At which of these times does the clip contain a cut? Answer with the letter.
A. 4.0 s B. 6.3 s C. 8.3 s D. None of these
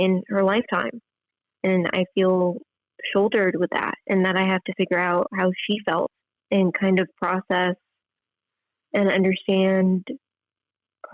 B